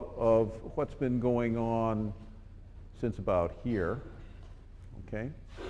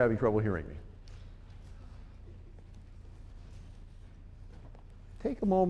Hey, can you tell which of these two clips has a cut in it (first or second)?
second